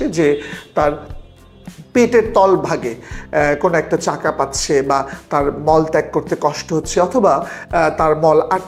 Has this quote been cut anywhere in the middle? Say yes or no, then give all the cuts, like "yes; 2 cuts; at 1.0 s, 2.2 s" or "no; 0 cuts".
no; 0 cuts